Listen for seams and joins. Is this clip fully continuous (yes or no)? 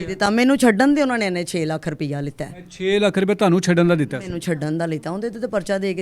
yes